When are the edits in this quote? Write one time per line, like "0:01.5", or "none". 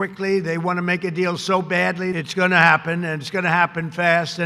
0:02.1